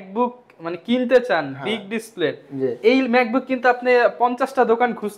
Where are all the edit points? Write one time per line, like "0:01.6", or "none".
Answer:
none